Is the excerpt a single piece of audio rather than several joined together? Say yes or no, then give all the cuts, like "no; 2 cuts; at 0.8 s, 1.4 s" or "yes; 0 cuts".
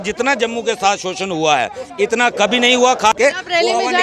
no; 1 cut; at 3.1 s